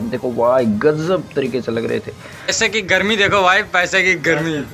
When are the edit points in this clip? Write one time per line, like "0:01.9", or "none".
0:02.5